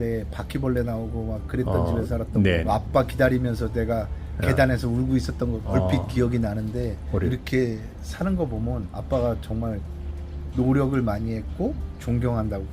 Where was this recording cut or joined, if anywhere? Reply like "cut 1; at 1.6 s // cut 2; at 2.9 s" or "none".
cut 1; at 2.6 s // cut 2; at 5.6 s // cut 3; at 7.3 s // cut 4; at 8.9 s